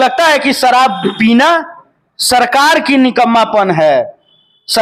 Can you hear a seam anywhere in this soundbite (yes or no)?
no